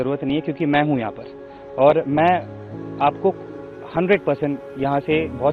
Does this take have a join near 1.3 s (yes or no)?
no